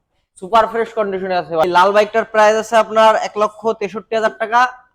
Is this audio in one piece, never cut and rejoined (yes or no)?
no